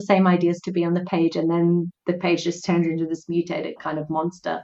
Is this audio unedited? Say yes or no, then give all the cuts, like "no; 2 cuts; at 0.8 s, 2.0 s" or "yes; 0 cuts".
yes; 0 cuts